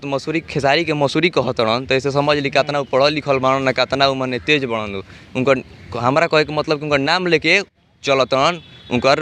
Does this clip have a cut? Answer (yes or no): no